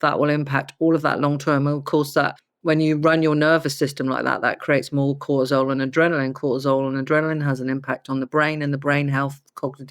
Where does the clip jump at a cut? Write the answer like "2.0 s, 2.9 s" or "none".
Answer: 2.5 s